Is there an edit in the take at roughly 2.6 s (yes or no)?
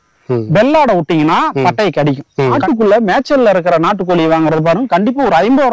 yes